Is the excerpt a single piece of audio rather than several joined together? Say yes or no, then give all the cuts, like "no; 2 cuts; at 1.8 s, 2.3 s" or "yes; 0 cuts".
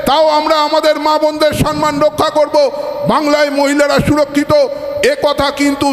yes; 0 cuts